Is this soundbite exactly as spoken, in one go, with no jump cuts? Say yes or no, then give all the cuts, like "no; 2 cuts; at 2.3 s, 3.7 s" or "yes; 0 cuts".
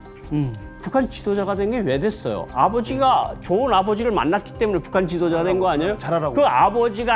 yes; 0 cuts